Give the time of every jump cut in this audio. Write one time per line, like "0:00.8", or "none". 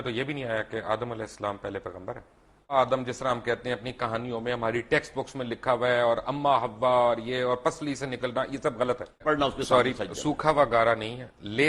0:02.7
0:09.2